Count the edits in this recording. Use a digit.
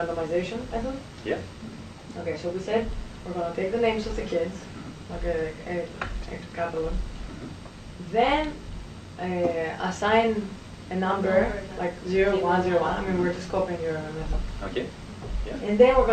1